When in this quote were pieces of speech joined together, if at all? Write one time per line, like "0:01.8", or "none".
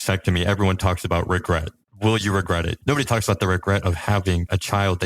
0:02.7